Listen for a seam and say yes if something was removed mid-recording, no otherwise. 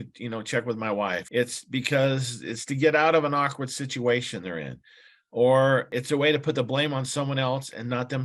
yes